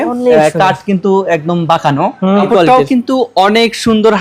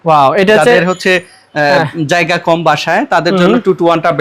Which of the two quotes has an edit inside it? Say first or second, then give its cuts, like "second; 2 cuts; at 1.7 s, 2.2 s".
first; 1 cut; at 2.4 s